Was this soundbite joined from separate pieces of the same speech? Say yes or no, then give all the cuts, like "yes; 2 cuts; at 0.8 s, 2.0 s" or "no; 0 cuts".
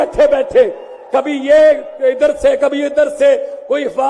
no; 0 cuts